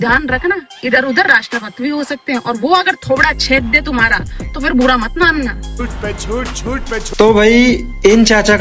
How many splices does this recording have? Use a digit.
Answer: 0